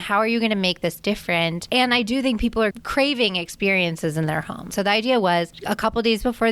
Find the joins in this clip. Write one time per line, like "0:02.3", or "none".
0:01.6
0:02.8
0:04.7
0:05.5